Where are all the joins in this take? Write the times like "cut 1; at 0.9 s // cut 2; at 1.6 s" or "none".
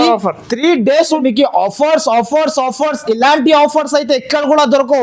cut 1; at 1.2 s